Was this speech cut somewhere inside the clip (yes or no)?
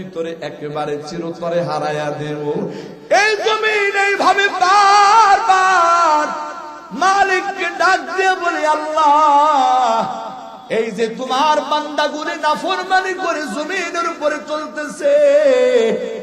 yes